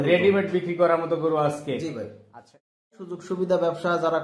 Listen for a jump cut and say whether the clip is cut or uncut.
cut